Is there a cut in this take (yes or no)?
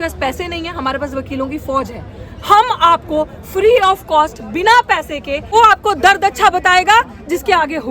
yes